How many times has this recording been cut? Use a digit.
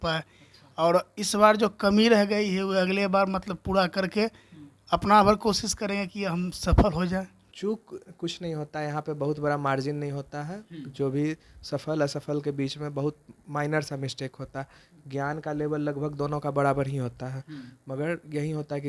1